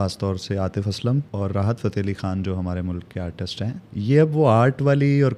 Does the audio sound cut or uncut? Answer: cut